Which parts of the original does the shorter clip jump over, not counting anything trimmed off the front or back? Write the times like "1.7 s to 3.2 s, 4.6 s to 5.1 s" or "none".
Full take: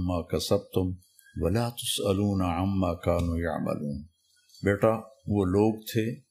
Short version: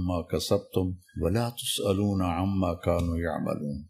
1.0 s to 1.2 s